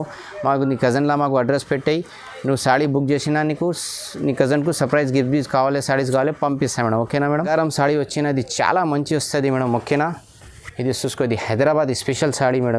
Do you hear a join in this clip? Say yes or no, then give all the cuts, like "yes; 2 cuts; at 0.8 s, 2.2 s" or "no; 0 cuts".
yes; 1 cut; at 7.5 s